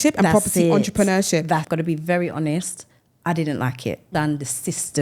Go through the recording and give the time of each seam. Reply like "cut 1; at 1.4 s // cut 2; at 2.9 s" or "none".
cut 1; at 1.7 s // cut 2; at 4.0 s